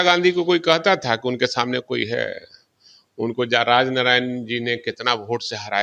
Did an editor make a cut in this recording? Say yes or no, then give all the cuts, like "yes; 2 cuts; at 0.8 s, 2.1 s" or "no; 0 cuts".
no; 0 cuts